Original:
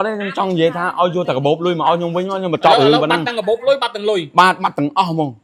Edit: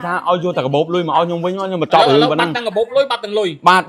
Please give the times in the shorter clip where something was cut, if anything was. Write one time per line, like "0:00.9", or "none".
none